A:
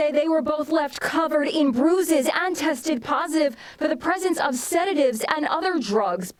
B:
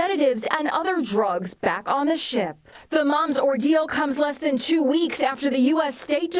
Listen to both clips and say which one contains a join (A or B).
B